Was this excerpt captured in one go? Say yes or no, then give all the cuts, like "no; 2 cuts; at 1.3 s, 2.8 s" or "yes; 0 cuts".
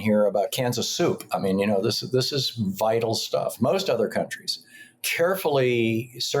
no; 1 cut; at 3.6 s